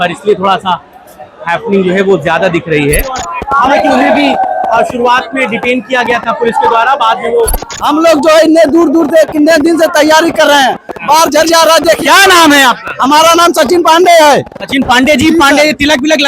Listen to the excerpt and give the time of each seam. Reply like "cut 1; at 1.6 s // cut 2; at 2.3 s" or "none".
cut 1; at 3.3 s // cut 2; at 7.7 s